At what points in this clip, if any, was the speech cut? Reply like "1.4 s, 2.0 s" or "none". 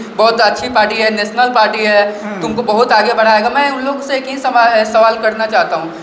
none